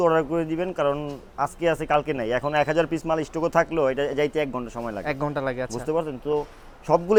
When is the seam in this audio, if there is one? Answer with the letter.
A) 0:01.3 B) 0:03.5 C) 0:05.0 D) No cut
D